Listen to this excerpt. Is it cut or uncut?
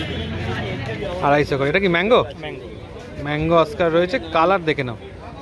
cut